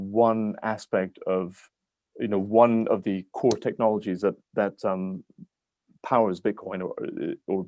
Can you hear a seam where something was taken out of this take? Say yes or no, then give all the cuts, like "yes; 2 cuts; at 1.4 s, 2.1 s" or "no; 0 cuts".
no; 0 cuts